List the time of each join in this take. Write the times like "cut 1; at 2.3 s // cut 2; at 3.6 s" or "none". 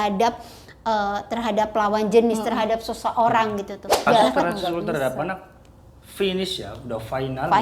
cut 1; at 4.1 s